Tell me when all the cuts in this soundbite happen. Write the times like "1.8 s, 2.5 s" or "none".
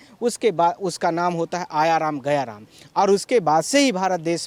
none